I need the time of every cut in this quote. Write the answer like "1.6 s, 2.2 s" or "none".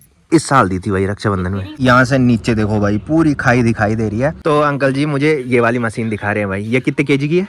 1.8 s, 4.4 s